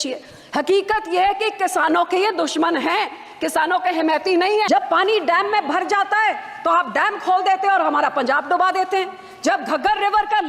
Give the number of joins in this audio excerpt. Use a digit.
1